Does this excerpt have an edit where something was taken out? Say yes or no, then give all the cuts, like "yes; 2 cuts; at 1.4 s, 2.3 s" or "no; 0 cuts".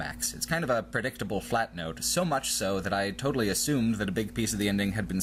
no; 0 cuts